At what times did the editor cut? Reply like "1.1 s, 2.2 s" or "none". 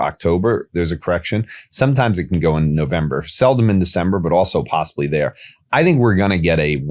none